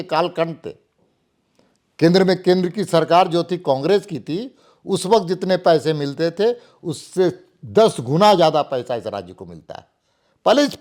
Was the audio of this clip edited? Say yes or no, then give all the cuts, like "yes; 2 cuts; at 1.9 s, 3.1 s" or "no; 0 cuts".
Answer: no; 0 cuts